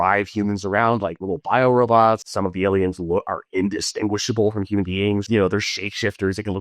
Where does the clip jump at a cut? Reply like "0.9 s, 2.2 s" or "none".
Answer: 2.3 s, 5.3 s